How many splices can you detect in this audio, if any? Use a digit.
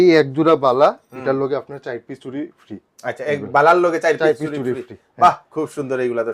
0